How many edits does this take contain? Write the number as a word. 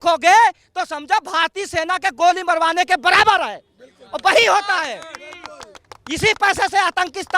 zero